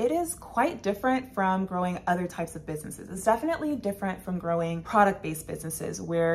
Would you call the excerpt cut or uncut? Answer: uncut